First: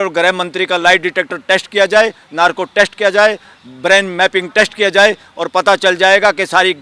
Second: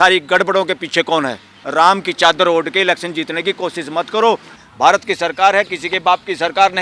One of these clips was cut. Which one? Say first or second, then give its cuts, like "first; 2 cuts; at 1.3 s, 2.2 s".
second; 2 cuts; at 1.6 s, 4.6 s